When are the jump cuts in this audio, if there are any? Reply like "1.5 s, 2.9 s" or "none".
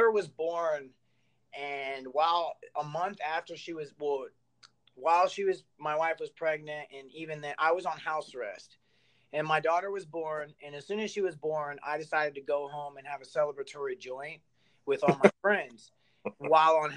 none